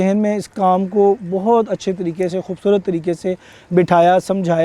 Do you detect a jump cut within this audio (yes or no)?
no